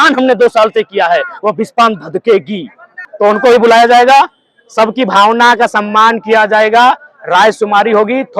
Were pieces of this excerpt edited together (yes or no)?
yes